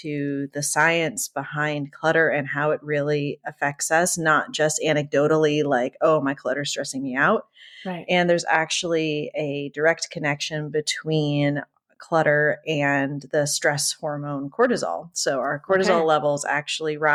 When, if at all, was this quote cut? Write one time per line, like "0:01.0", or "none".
none